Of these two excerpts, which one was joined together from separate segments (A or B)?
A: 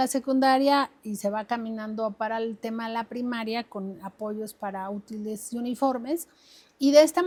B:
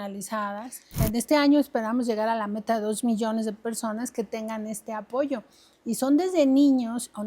B